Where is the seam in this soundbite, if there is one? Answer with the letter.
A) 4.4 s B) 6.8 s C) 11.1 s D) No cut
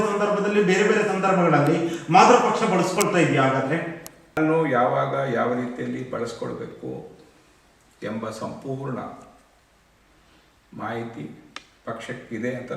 A